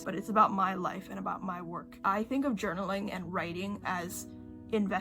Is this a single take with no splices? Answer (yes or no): no